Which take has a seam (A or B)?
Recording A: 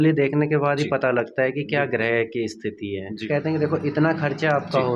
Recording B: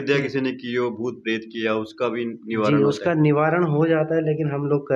A